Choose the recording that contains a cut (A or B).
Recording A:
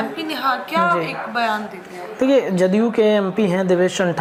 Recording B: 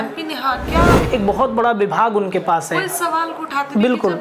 B